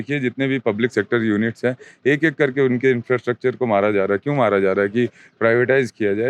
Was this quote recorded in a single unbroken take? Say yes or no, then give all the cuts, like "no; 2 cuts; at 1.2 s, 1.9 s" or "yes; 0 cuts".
yes; 0 cuts